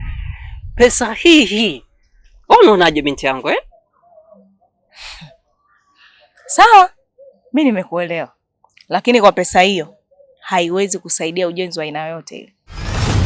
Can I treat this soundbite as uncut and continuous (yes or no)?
no